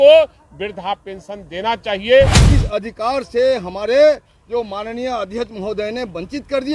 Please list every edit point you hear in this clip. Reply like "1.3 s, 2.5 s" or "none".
2.4 s